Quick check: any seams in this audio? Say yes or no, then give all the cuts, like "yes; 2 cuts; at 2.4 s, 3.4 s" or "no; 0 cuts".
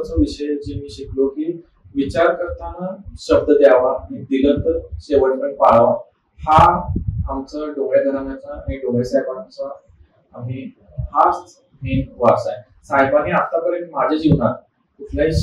no; 0 cuts